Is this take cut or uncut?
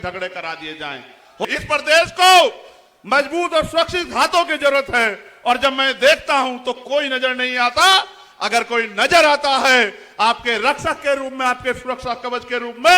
cut